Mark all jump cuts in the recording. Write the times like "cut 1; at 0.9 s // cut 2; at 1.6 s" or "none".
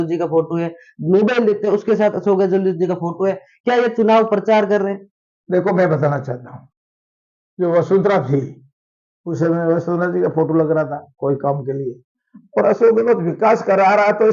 none